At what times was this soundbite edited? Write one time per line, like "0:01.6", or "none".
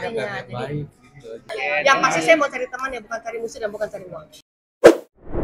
0:01.5
0:04.5